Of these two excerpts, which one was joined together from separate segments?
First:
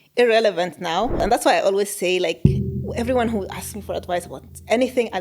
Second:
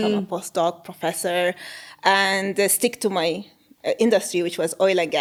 first; 1 cut; at 1.2 s

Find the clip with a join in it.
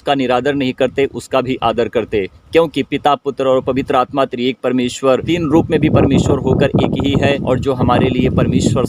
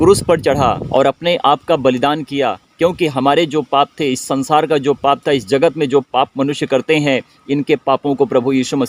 first; 2 cuts; at 5.3 s, 7.4 s

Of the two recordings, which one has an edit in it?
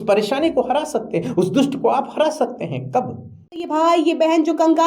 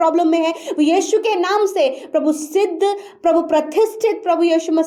first; 1 cut; at 3.6 s

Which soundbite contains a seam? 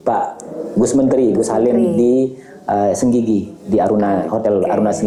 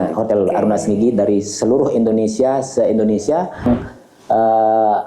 second; 1 cut; at 3.7 s

